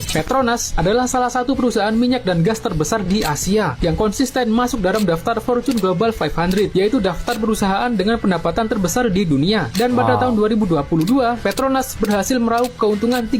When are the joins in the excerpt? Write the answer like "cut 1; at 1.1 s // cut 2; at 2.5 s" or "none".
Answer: none